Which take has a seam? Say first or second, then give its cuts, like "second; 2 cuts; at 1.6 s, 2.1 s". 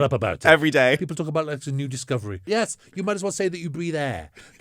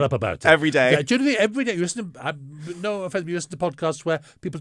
first; 2 cuts; at 1.0 s, 2.4 s